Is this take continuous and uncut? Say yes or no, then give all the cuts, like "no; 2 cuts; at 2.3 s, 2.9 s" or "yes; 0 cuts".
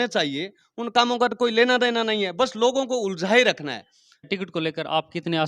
no; 1 cut; at 4.2 s